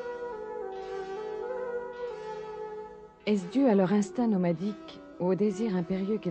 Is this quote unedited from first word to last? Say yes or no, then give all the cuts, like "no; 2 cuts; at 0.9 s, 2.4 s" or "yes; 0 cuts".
no; 1 cut; at 0.9 s